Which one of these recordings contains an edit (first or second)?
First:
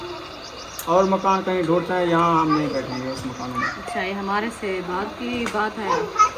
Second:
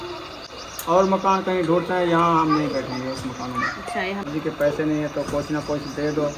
second